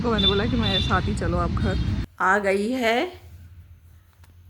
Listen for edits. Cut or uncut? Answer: cut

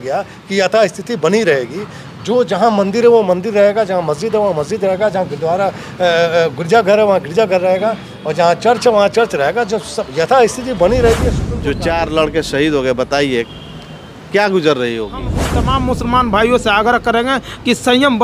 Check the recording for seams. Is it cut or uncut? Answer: cut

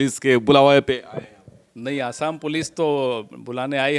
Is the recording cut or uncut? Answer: uncut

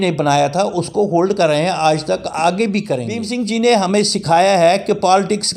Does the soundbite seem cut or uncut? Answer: cut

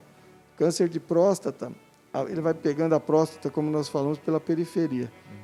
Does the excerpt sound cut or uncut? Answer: uncut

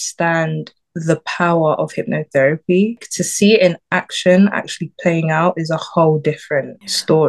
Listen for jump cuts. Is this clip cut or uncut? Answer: uncut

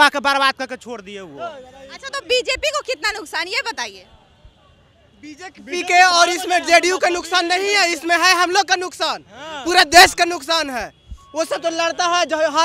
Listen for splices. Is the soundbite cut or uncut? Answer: uncut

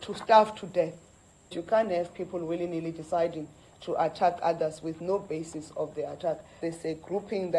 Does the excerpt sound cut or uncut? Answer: cut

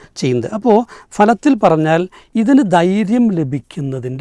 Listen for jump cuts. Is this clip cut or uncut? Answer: uncut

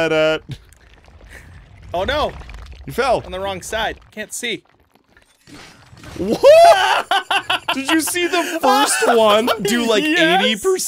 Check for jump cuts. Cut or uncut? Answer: cut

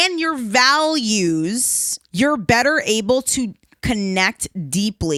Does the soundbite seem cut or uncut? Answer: uncut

